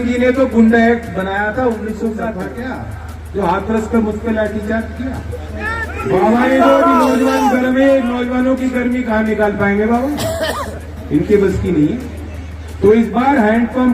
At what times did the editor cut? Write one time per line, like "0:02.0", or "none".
0:02.3
0:06.0